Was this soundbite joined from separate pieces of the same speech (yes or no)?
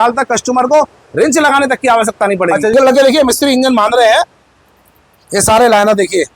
yes